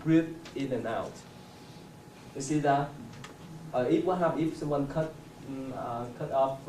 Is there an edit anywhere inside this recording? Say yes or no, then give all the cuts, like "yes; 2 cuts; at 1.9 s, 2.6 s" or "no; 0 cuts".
yes; 1 cut; at 2.5 s